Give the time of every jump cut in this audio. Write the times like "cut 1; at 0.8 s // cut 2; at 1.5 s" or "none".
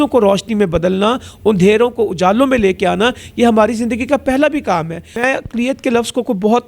cut 1; at 5.0 s